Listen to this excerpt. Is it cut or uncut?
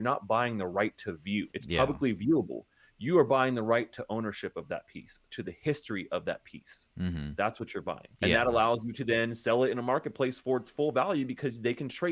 cut